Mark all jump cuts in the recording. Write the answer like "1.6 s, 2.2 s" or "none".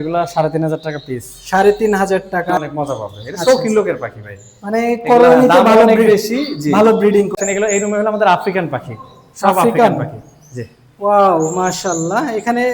2.5 s, 7.3 s

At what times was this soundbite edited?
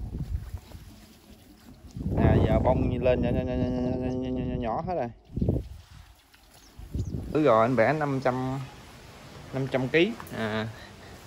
7.3 s

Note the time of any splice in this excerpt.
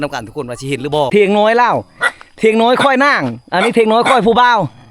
1.1 s

